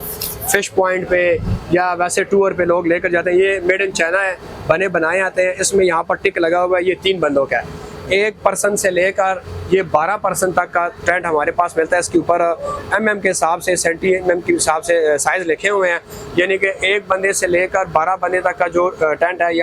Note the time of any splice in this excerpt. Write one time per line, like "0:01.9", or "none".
none